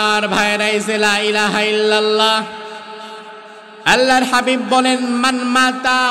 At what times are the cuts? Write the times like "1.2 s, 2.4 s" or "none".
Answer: none